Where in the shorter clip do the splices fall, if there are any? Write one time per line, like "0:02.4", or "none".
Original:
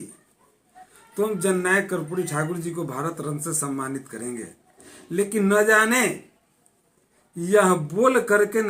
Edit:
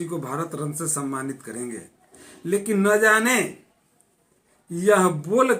none

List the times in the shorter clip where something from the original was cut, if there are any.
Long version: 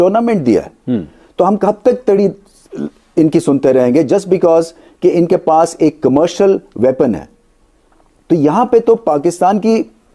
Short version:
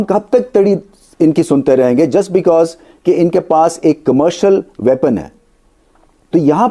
0:01.0

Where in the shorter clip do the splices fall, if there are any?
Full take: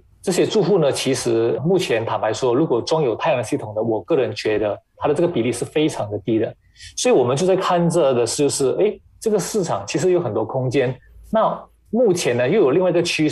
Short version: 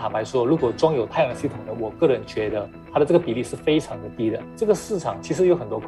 0:04.5

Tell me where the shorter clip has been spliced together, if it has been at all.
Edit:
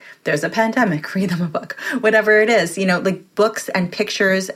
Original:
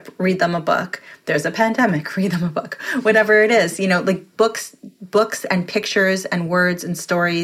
0:03.2

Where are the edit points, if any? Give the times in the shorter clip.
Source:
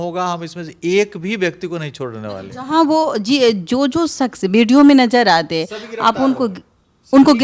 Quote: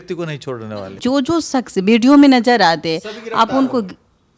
0:01.0

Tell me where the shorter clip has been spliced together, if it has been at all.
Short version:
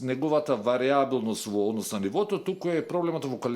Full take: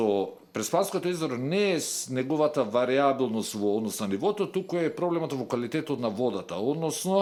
none

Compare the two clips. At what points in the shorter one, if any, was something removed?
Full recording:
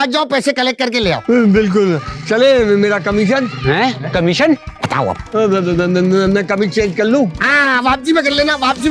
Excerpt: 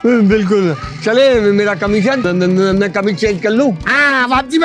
0:02.3

